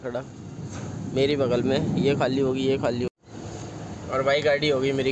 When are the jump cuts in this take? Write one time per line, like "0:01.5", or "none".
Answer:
0:03.1

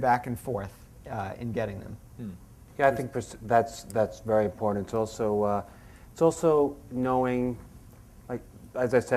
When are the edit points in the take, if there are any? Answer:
0:02.9

